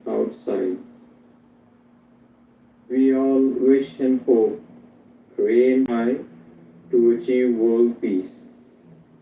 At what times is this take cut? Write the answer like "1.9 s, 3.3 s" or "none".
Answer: 5.9 s